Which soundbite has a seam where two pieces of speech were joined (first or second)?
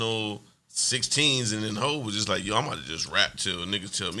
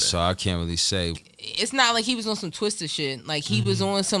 second